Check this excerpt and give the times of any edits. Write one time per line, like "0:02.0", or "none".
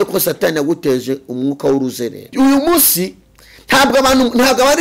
0:02.3